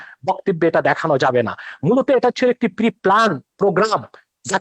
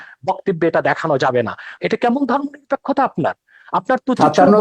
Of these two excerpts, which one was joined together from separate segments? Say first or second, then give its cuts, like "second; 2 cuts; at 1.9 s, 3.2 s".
second; 1 cut; at 1.7 s